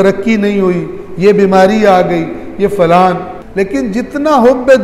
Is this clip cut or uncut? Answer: cut